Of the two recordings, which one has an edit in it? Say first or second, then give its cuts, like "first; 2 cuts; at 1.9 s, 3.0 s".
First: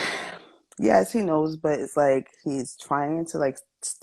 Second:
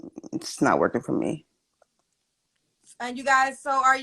second; 1 cut; at 2.5 s